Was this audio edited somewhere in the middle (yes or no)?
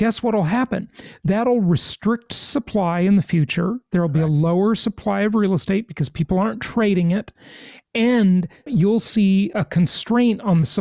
yes